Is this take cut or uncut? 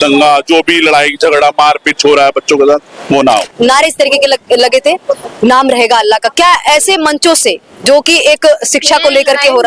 cut